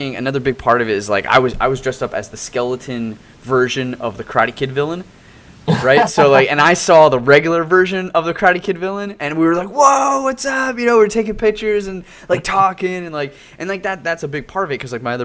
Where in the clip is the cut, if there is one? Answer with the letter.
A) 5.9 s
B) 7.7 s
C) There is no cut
B